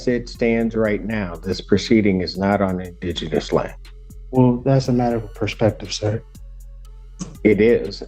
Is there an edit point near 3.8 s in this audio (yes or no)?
no